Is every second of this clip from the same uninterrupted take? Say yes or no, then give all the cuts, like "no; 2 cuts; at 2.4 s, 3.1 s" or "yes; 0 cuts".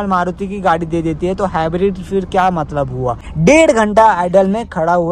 no; 1 cut; at 3.3 s